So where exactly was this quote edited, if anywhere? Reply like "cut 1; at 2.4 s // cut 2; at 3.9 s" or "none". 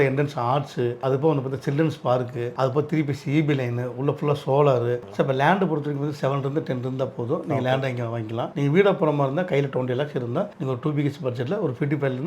cut 1; at 1.0 s // cut 2; at 5.0 s